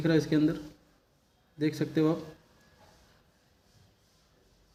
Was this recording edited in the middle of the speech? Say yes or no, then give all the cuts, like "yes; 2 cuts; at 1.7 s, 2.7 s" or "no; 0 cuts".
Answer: no; 0 cuts